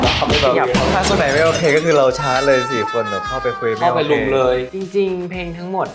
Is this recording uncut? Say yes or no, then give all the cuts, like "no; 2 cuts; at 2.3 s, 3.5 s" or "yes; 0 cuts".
no; 1 cut; at 4.7 s